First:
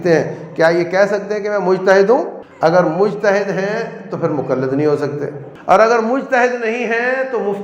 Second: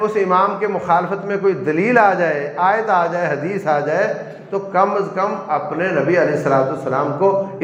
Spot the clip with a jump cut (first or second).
first